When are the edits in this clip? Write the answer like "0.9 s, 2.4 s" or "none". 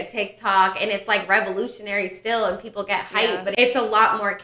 3.5 s